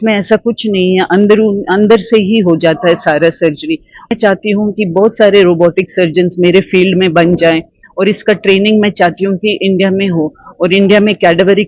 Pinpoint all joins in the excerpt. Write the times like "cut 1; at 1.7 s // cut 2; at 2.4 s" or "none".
cut 1; at 4.1 s

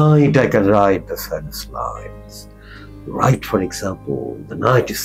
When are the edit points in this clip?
none

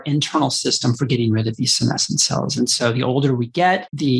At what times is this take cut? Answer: none

